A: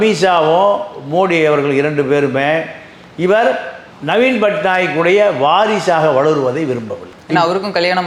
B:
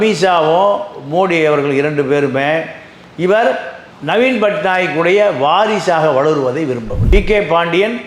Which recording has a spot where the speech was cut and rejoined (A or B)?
B